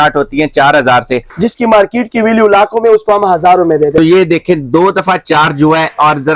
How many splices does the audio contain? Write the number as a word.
two